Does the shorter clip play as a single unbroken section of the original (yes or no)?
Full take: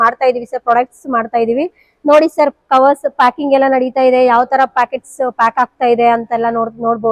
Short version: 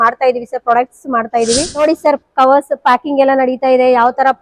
no